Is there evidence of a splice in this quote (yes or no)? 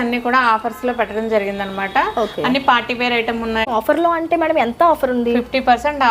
yes